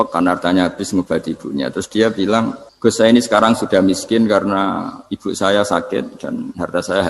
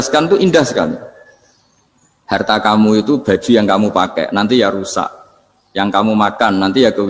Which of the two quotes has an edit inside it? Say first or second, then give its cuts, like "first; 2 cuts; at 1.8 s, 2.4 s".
first; 1 cut; at 2.6 s